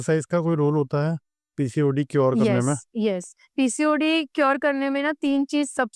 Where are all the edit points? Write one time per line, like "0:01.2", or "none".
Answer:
none